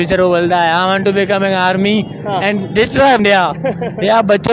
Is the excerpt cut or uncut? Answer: cut